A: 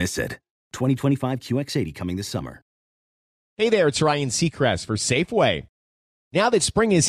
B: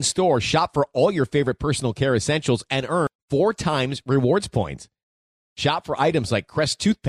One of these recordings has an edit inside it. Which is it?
A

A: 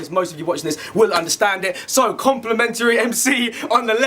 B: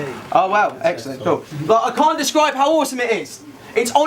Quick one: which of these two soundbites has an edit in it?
A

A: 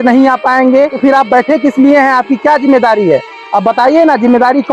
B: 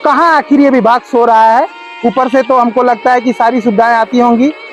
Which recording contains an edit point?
A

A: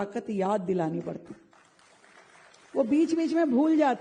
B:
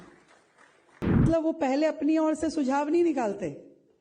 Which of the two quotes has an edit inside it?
B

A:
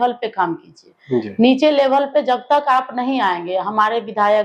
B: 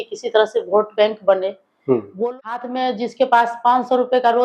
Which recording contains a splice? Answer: B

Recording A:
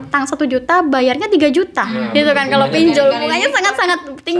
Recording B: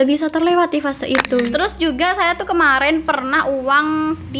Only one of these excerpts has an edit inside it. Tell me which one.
B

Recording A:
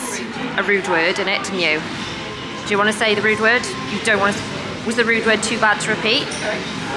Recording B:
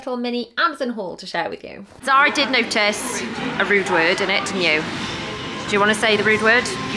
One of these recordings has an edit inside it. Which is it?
B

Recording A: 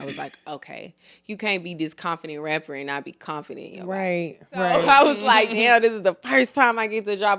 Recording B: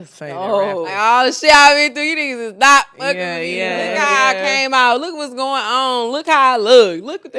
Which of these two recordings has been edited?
A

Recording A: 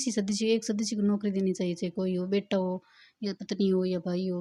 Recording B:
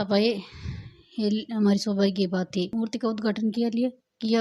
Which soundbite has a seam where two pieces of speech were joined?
B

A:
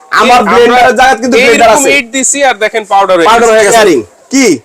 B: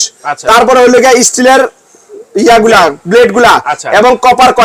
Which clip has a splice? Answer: A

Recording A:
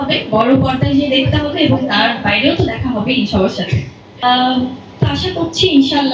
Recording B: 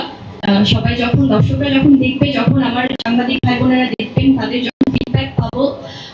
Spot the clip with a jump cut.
A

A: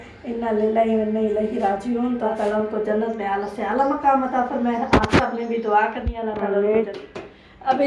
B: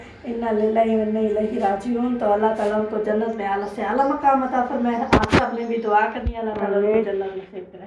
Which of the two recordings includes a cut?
A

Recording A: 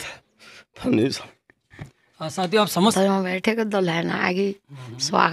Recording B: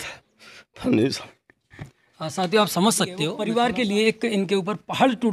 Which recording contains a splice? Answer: A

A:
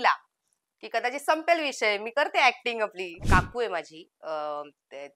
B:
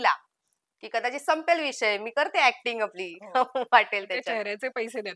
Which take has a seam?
A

